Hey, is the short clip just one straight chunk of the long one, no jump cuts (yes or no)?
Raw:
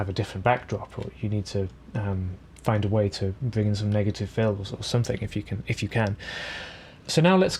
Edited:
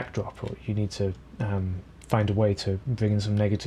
yes